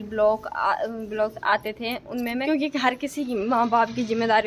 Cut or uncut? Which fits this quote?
cut